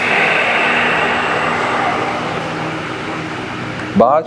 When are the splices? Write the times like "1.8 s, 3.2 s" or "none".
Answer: none